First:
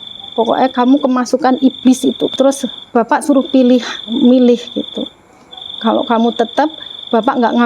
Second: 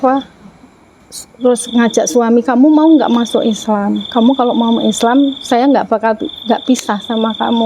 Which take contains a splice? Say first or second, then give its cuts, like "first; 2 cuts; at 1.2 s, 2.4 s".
first; 1 cut; at 2.3 s